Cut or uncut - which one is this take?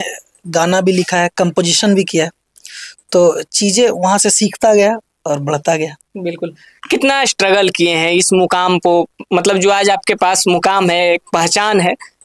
uncut